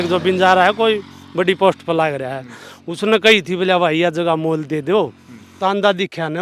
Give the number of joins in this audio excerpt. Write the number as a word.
one